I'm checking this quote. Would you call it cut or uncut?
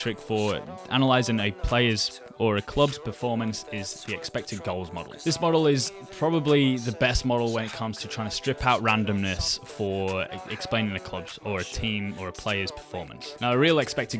cut